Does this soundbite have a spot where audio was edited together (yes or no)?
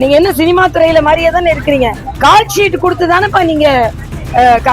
yes